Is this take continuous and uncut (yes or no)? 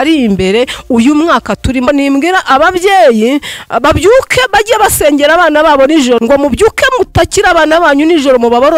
no